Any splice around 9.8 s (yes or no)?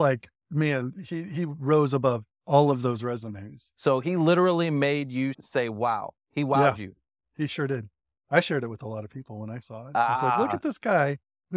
no